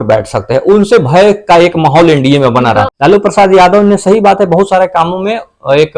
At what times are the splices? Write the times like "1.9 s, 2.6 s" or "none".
2.9 s